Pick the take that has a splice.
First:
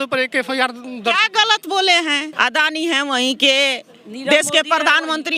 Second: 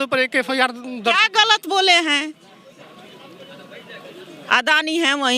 first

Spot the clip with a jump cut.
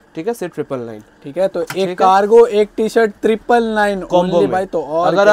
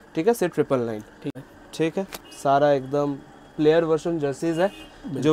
second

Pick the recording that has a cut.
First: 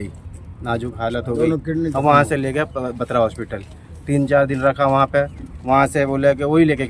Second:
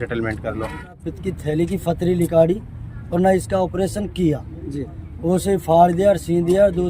second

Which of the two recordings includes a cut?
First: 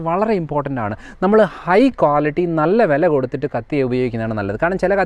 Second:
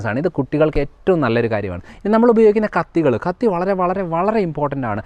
second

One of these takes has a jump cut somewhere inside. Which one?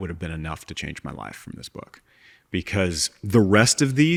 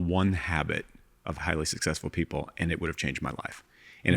second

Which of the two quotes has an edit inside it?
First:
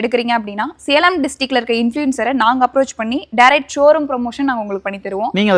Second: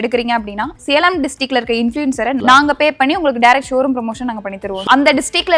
second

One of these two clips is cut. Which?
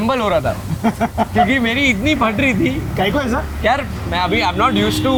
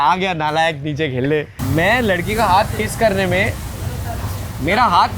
second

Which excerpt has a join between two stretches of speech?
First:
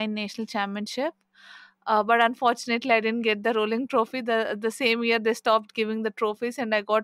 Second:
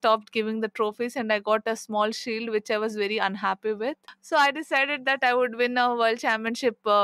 second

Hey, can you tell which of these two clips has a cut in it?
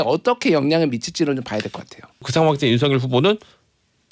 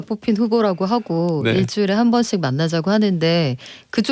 first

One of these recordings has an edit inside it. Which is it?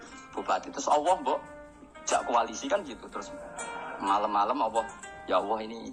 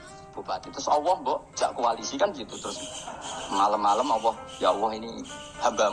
second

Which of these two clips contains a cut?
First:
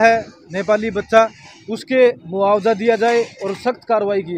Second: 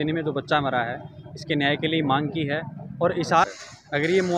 second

